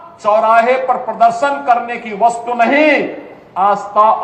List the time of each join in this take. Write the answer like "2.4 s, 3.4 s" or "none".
none